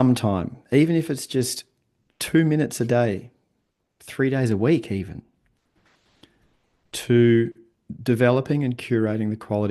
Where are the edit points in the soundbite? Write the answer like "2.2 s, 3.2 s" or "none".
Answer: none